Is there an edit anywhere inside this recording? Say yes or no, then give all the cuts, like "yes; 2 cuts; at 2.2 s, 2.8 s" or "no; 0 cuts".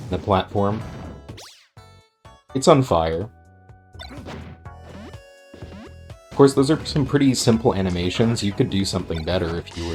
no; 0 cuts